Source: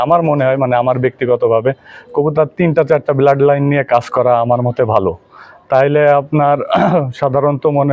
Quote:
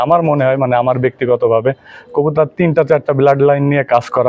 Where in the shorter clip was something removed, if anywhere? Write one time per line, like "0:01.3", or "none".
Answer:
none